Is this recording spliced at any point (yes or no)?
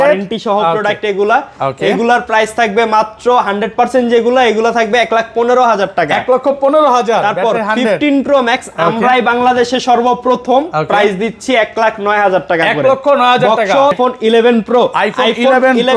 yes